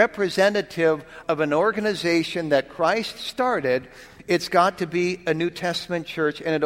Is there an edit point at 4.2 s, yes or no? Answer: no